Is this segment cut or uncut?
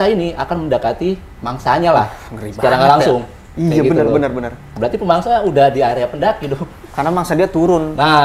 uncut